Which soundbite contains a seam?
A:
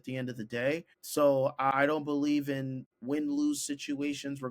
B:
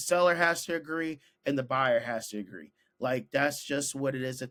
A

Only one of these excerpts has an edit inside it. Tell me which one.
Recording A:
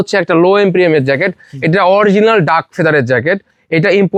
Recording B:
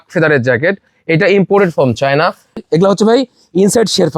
B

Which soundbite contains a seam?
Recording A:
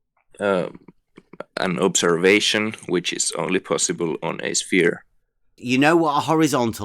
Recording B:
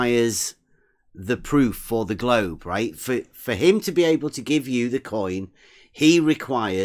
A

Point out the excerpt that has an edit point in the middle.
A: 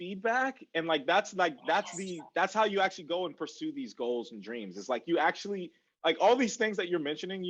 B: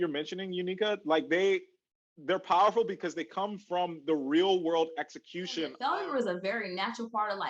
B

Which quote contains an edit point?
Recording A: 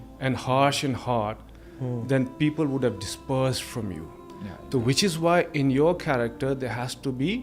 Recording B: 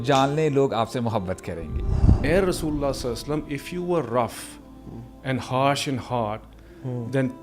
B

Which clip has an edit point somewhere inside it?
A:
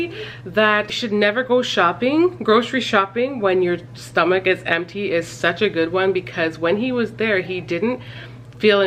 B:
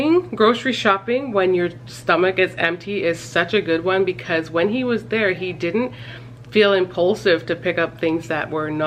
A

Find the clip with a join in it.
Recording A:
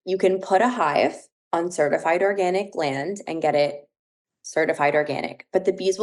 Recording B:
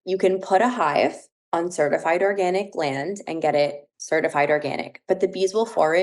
B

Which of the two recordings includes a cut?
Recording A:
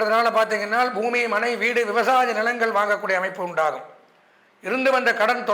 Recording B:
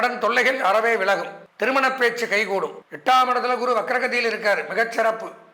B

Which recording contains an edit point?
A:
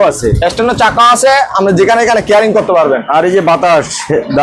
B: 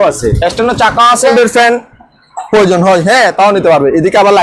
B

